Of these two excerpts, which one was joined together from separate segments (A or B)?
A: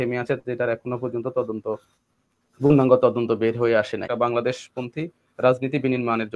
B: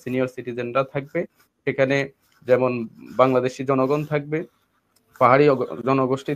A